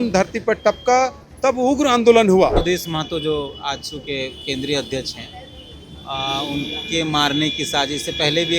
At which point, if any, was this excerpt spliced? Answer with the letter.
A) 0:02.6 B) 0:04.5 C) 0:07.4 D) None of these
A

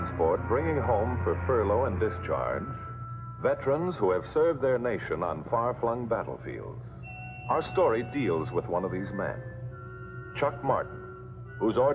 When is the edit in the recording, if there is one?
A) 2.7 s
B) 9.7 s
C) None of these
C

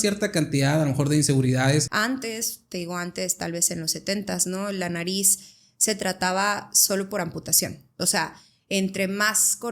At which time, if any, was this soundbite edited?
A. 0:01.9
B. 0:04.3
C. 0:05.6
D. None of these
A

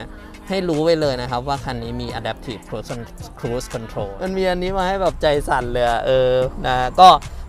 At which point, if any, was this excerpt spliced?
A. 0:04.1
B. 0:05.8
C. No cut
A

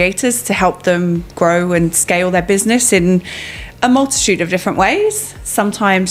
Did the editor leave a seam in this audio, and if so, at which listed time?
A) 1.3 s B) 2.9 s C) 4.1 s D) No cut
D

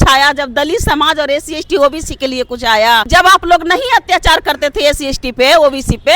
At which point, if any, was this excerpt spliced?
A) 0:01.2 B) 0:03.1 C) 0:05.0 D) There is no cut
B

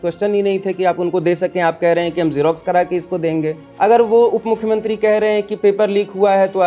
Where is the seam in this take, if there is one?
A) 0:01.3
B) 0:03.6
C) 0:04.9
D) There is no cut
B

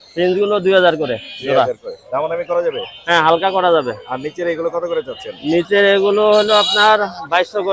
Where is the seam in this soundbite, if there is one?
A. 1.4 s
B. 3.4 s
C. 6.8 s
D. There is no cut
D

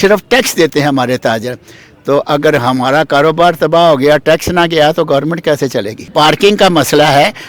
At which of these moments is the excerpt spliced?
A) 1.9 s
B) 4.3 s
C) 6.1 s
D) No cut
C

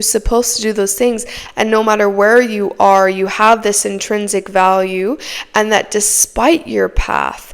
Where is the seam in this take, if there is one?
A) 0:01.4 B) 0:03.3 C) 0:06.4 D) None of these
A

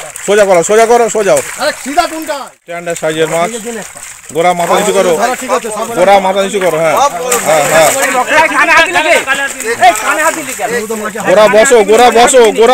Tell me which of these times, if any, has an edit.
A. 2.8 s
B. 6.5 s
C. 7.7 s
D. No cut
A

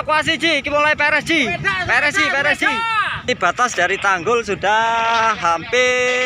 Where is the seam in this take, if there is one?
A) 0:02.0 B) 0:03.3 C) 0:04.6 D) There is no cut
B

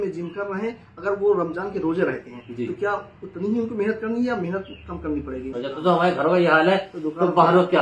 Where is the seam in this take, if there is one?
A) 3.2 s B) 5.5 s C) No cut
B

